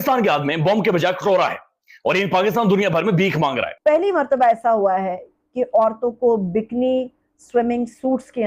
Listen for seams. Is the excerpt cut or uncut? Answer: cut